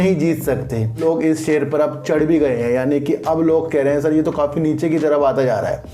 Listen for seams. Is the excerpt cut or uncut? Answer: cut